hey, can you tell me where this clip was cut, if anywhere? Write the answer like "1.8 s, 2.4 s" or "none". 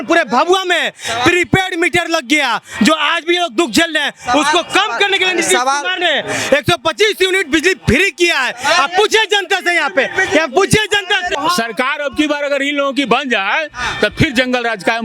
none